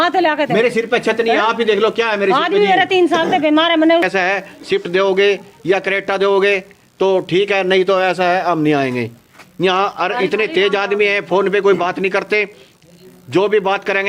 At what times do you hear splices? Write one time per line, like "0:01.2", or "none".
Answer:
0:04.0